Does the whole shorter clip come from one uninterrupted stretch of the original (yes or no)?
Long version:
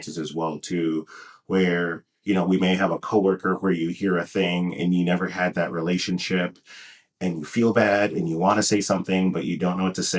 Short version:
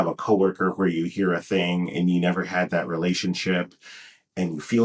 yes